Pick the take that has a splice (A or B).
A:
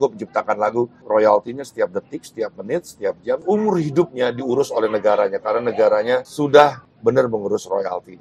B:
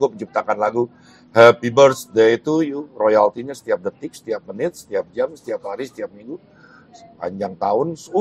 A